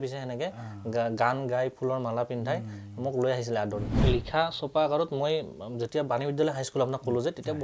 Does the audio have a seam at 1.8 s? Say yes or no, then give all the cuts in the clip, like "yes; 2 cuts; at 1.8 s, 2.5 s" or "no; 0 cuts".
no; 1 cut; at 4.0 s